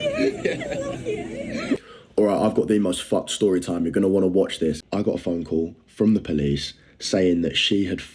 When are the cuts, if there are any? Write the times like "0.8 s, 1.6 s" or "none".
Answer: 1.8 s, 4.8 s